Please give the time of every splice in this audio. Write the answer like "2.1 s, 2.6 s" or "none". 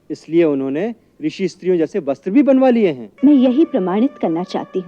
3.1 s